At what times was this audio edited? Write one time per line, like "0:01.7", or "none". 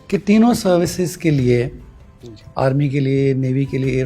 none